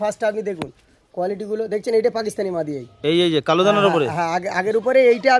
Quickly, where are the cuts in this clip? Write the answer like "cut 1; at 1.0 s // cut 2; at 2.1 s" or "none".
none